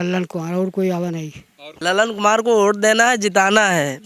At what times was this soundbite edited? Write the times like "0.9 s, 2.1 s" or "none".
1.7 s